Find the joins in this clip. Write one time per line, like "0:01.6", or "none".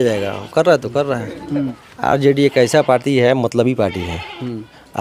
0:01.8